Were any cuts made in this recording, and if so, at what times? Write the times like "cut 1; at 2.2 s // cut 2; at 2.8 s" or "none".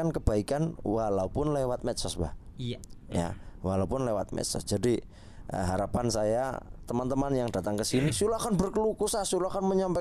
cut 1; at 8.1 s